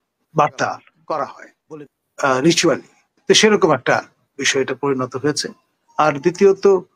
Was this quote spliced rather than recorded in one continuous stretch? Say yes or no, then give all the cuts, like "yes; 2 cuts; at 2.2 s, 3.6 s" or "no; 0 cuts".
yes; 1 cut; at 0.9 s